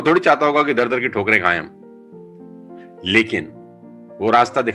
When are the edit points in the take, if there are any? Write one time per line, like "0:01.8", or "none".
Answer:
0:01.7
0:03.0